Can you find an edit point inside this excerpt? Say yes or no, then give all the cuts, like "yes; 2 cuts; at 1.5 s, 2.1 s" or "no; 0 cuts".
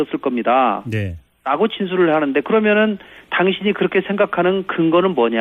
no; 0 cuts